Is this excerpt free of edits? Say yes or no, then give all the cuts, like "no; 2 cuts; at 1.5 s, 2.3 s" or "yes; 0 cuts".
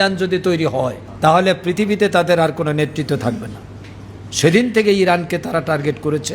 no; 1 cut; at 1.0 s